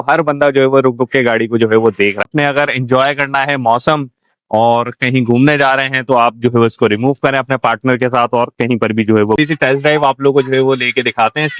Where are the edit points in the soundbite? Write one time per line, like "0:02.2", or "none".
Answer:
0:02.3
0:09.4

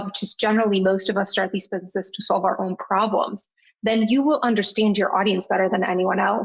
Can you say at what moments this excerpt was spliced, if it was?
none

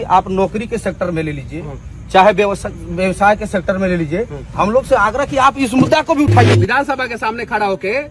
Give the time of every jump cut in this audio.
0:06.5

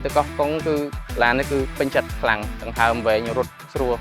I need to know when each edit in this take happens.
0:02.2

